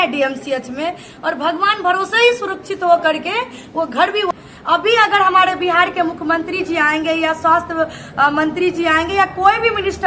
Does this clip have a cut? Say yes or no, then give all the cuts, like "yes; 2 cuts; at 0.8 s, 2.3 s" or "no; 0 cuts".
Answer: yes; 1 cut; at 4.3 s